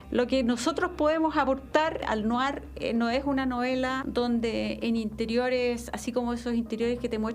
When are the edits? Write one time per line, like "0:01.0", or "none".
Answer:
0:02.1
0:04.0